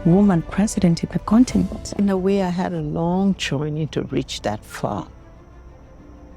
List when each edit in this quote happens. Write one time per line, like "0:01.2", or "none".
0:01.9